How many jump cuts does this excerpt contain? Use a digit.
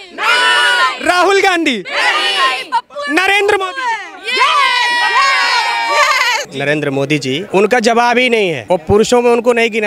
3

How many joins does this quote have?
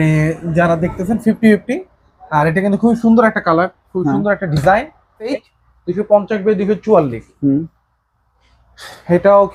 1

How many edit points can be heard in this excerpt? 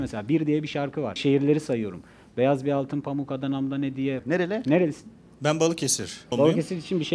3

